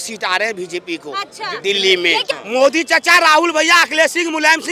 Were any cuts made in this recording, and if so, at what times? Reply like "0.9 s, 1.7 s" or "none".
2.2 s